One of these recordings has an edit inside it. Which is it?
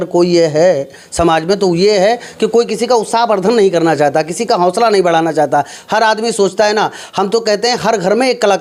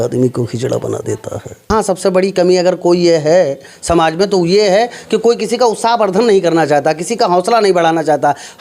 second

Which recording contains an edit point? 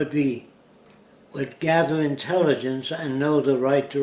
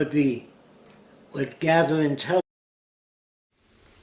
first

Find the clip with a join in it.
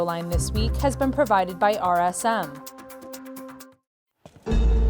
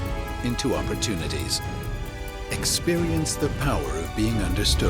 first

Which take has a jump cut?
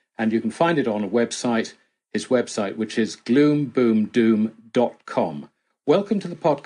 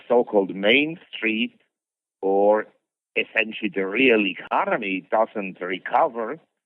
second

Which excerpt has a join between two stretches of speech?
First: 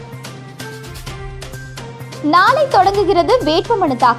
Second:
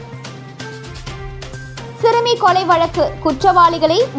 first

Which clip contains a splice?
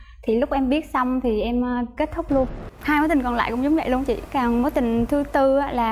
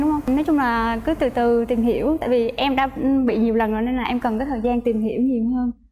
first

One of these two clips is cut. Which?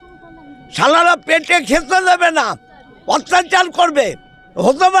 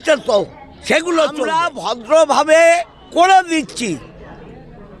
second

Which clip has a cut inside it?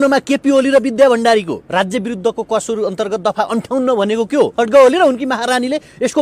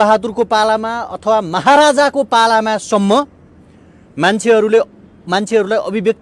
first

